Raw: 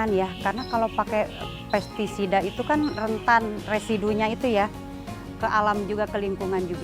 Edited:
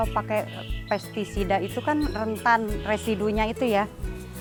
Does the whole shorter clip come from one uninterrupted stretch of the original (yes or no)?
yes